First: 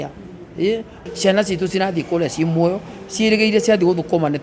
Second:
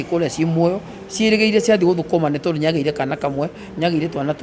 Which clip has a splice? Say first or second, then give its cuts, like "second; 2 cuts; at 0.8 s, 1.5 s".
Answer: first; 1 cut; at 1.0 s